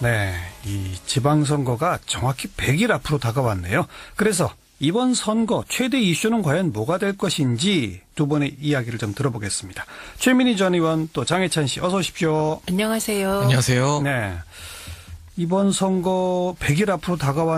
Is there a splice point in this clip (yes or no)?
no